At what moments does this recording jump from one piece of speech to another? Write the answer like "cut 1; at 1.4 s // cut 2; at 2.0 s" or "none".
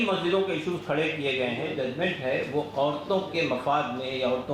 cut 1; at 1.7 s